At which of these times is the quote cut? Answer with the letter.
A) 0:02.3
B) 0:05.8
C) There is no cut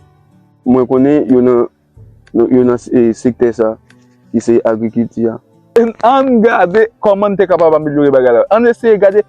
B